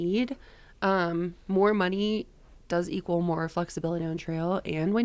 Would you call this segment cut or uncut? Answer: uncut